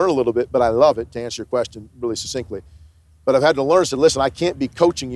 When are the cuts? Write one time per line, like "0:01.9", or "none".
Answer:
none